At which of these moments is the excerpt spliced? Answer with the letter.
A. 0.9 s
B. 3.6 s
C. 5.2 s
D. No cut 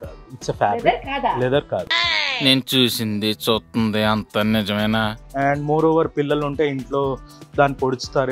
C